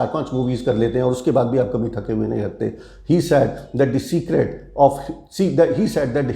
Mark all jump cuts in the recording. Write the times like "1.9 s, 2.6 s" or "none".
none